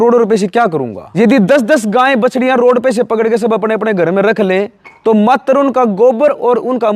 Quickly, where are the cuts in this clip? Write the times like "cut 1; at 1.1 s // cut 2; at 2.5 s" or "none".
cut 1; at 1.0 s